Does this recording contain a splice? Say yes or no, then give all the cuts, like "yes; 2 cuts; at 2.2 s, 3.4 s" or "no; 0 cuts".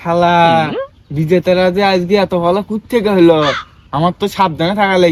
no; 0 cuts